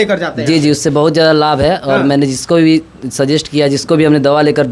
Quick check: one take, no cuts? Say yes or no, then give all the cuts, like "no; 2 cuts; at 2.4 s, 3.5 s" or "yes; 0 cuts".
yes; 0 cuts